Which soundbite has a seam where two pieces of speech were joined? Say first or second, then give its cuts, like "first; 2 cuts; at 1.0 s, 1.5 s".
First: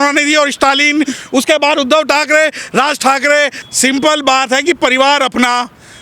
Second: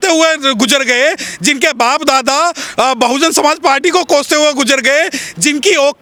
first; 1 cut; at 3.6 s